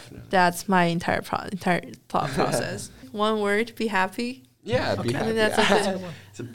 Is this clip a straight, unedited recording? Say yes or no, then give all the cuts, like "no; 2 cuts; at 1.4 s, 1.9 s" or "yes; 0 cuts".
yes; 0 cuts